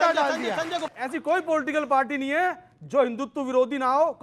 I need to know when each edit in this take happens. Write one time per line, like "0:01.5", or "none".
0:00.9